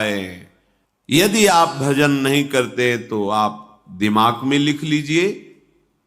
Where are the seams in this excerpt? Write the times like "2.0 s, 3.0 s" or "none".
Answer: 1.1 s